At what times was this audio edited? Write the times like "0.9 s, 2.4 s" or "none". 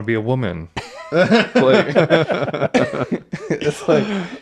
none

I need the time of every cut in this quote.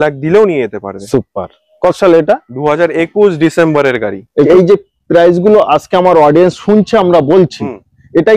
4.5 s

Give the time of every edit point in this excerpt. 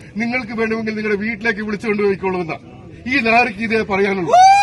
none

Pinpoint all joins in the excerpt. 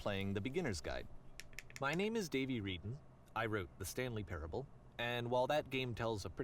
1.6 s

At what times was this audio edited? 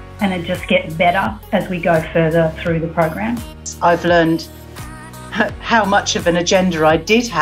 3.7 s

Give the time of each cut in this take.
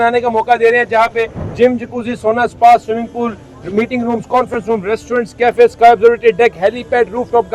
none

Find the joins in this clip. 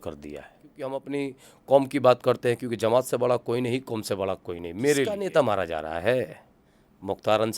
0.9 s, 5.1 s

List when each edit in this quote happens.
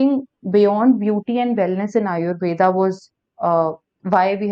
none

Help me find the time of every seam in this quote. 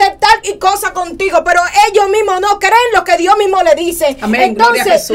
none

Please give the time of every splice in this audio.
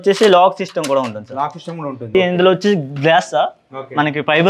2.1 s

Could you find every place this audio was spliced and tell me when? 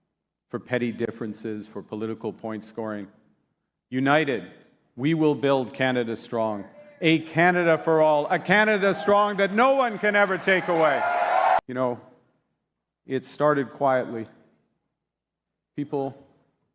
11.6 s

